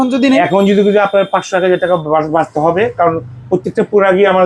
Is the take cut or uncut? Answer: uncut